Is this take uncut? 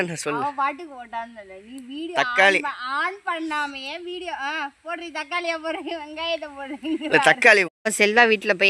no; 1 cut; at 7.7 s

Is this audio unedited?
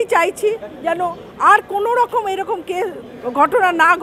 yes; 0 cuts

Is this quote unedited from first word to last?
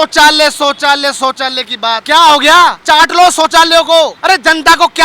no; 3 cuts; at 2.0 s, 2.8 s, 4.2 s

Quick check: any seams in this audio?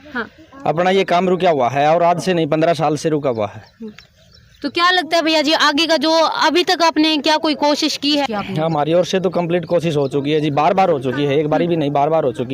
no; 0 cuts

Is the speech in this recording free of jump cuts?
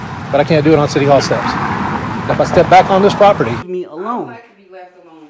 no; 1 cut; at 3.6 s

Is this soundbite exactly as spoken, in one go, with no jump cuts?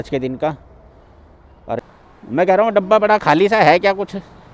no; 1 cut; at 1.8 s

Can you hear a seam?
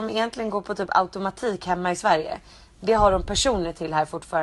no; 0 cuts

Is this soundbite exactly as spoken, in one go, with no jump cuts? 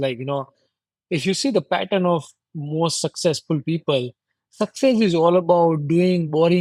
yes; 0 cuts

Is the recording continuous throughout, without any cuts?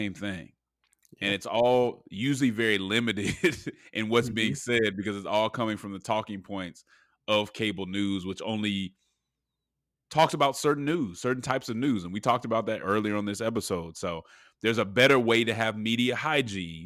no; 1 cut; at 12.8 s

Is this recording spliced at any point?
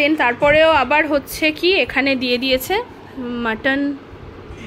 no; 0 cuts

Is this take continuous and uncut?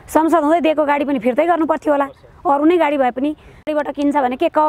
no; 1 cut; at 3.7 s

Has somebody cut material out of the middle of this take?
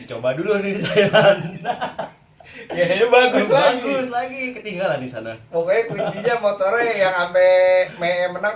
no; 0 cuts

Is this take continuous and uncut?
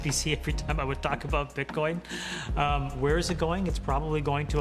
yes; 0 cuts

